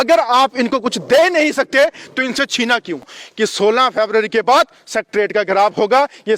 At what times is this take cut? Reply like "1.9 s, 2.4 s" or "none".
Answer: 3.2 s